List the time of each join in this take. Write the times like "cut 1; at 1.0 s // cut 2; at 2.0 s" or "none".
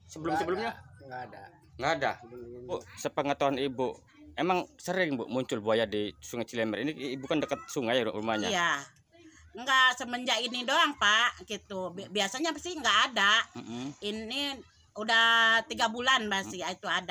cut 1; at 2.7 s